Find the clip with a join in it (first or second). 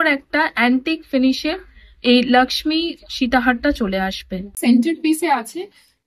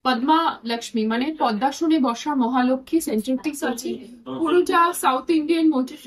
first